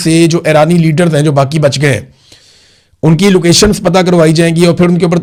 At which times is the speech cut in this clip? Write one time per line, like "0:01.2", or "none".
none